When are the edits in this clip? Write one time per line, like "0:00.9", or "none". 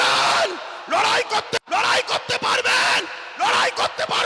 0:01.6